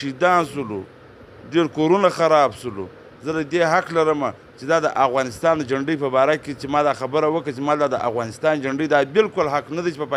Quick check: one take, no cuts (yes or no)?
yes